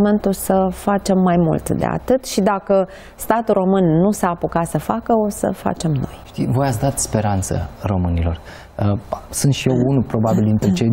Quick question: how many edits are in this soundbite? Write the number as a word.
zero